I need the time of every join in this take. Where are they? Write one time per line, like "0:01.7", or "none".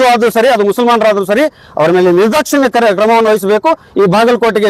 none